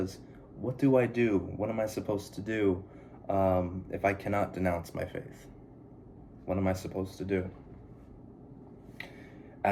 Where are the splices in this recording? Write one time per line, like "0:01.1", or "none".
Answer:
none